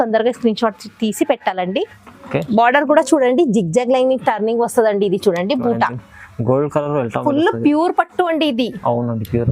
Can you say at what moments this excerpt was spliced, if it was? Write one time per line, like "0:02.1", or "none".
0:01.9